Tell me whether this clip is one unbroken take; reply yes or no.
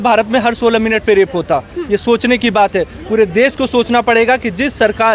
yes